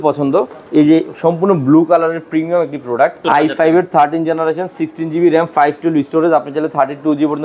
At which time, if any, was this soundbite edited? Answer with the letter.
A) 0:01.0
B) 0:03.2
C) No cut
B